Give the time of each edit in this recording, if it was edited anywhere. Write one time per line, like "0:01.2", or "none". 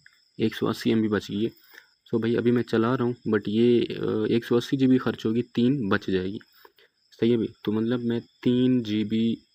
none

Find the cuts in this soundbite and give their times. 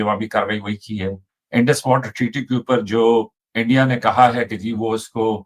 none

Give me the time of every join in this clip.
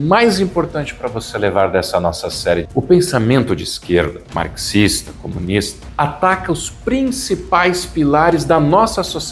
0:02.7
0:04.2
0:05.8

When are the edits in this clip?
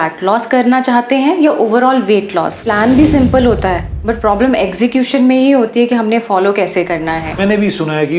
0:02.6
0:07.4

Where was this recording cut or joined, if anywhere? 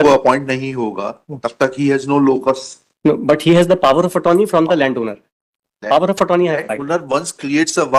none

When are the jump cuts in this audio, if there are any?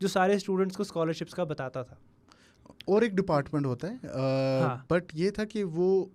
none

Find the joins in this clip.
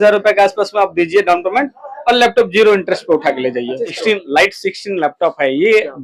0:04.0

